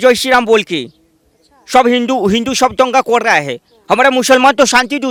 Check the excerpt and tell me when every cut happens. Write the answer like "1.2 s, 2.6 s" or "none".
none

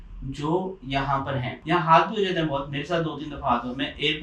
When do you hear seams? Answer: 1.5 s

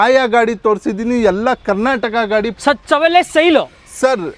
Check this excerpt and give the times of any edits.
none

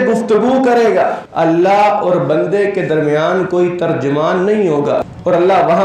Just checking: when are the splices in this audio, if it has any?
1.2 s, 5.1 s

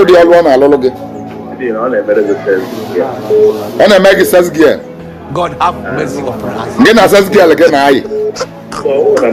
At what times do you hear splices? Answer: none

